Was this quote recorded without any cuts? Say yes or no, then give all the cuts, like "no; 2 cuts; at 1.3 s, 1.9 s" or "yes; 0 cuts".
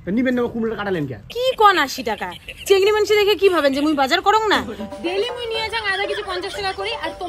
no; 1 cut; at 1.2 s